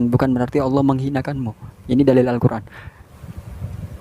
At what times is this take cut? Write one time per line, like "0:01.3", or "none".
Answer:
0:03.1